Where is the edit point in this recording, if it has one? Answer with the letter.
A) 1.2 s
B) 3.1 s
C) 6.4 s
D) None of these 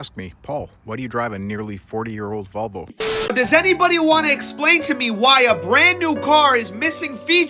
B